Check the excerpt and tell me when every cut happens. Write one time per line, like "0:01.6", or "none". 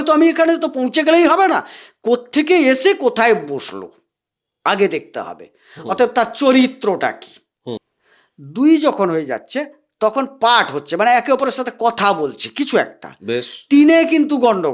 0:07.9